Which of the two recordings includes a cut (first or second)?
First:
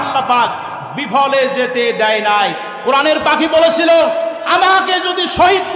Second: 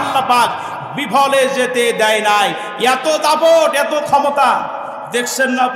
second